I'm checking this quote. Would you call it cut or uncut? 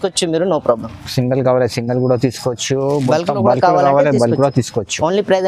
uncut